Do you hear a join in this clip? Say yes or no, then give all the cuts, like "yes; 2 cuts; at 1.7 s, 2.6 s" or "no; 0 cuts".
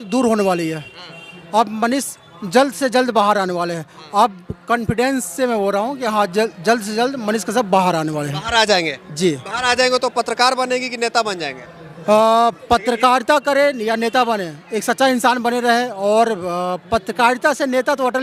no; 0 cuts